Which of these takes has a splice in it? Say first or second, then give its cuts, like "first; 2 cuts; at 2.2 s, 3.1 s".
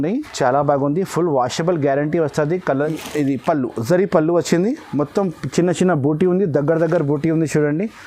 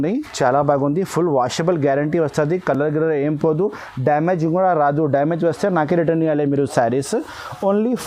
first; 1 cut; at 2.7 s